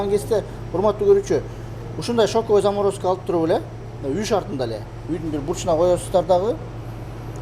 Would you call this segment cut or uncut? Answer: uncut